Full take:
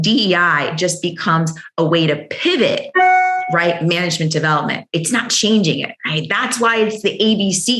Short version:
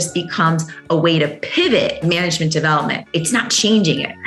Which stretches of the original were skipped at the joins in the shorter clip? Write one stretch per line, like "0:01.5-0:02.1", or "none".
0:02.9-0:03.8